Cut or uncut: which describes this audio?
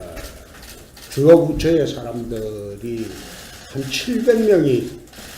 cut